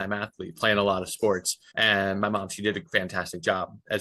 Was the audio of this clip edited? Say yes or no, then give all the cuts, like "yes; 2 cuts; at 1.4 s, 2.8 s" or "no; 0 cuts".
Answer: no; 0 cuts